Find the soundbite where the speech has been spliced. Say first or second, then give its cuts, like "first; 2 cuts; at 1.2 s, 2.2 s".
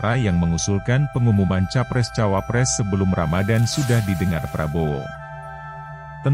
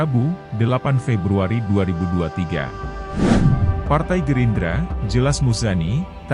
second; 2 cuts; at 3.0 s, 3.7 s